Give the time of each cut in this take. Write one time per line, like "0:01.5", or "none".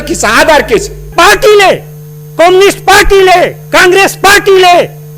0:01.1